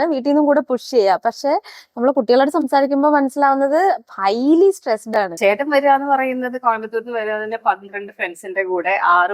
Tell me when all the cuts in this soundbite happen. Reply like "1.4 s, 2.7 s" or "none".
5.3 s